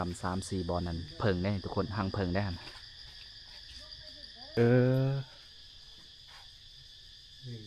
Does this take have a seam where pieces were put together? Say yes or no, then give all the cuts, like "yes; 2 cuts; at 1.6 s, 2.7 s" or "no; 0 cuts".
yes; 1 cut; at 4.6 s